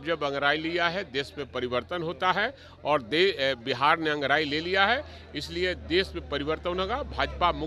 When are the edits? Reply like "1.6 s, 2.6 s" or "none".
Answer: none